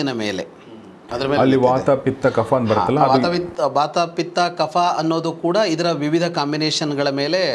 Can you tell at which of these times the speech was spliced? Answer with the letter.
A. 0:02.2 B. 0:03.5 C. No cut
C